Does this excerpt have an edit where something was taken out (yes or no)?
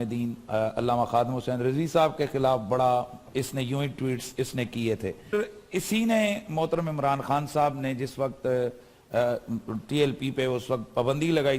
yes